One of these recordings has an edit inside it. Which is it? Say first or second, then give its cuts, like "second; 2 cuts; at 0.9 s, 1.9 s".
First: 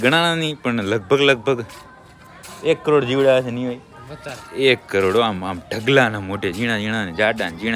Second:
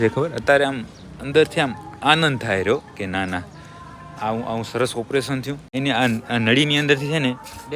second; 1 cut; at 5.7 s